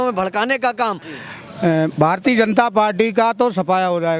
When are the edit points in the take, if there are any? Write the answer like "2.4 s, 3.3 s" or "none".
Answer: 1.1 s